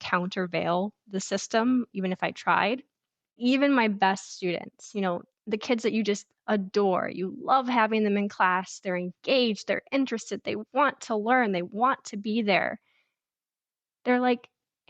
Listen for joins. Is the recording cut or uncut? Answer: cut